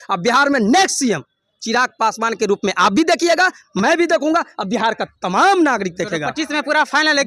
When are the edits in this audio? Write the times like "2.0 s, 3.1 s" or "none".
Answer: none